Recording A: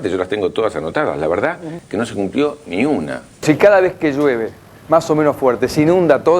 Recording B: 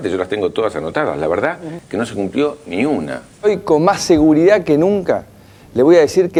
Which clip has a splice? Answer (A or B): A